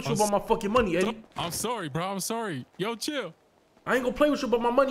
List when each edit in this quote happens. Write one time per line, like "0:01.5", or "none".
none